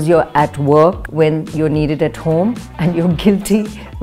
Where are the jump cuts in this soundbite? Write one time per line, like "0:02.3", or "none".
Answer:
0:01.0
0:02.7

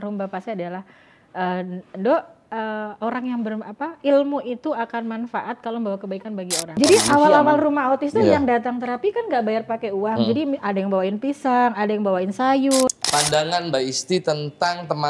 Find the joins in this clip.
0:06.8
0:12.9

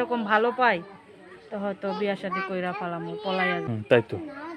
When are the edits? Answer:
0:03.6

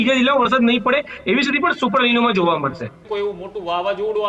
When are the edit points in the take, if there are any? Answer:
0:03.0

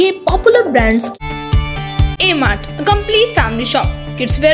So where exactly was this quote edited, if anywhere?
0:01.1

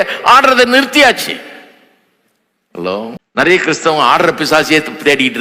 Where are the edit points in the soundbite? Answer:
0:03.5

